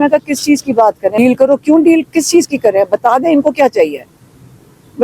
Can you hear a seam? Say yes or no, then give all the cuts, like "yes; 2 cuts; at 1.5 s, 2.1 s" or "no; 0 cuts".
yes; 1 cut; at 1.2 s